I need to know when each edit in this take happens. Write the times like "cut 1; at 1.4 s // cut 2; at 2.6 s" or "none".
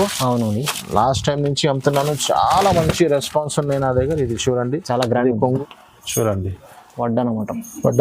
cut 1; at 5.6 s